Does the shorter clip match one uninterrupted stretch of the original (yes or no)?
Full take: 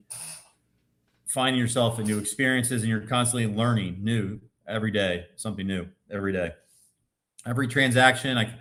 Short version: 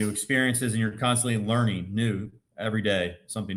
yes